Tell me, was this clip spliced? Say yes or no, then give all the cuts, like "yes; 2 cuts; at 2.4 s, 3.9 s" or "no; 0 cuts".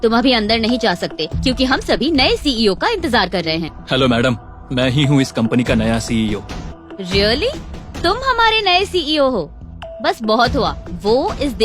yes; 2 cuts; at 3.7 s, 6.7 s